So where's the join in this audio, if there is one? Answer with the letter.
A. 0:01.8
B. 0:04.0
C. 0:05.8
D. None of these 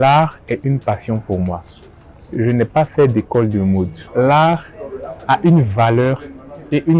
B